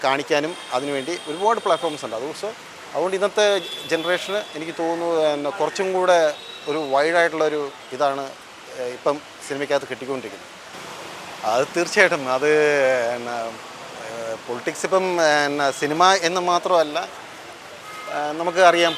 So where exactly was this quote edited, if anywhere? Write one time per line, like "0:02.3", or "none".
none